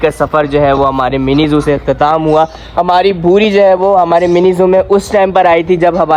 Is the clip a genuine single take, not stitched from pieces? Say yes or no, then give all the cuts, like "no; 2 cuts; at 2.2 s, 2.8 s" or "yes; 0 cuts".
yes; 0 cuts